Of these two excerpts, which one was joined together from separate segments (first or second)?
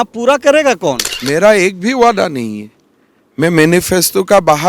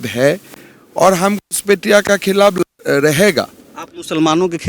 first